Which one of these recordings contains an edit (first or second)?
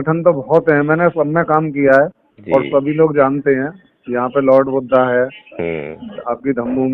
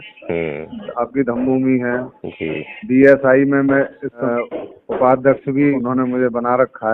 second